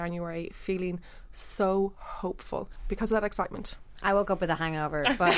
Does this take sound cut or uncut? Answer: cut